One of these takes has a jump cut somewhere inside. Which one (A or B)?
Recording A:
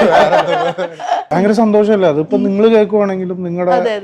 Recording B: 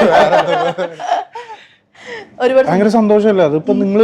A